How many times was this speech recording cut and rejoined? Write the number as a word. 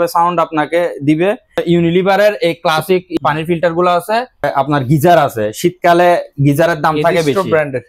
three